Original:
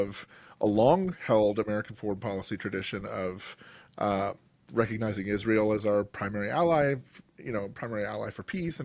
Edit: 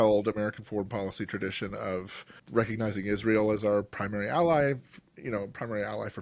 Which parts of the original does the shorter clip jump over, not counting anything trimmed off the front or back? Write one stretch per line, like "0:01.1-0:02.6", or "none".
0:03.6-0:04.5

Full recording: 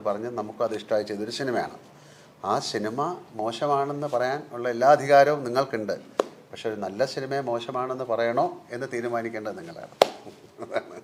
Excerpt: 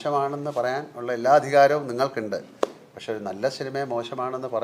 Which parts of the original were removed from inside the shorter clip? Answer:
none

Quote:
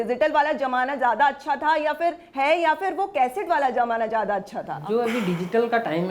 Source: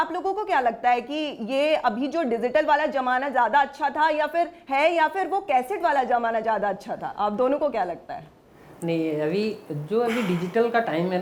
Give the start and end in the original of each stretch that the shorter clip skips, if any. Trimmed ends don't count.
0:07.0-0:09.7

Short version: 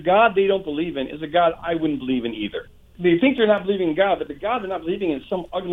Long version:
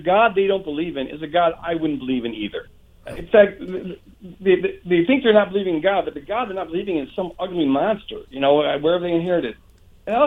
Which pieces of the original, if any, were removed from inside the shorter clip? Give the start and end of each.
0:02.9-0:04.8

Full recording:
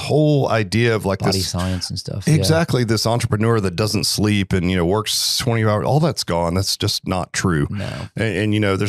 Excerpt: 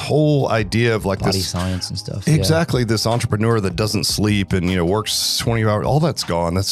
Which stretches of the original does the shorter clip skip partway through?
none

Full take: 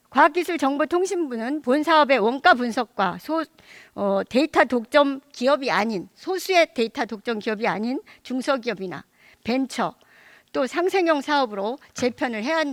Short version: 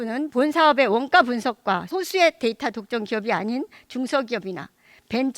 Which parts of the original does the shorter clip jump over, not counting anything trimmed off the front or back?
0:03.2-0:06.2

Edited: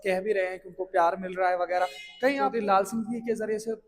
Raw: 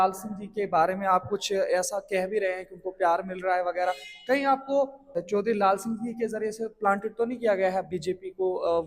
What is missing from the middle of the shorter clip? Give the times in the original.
0:04.6-0:05.5

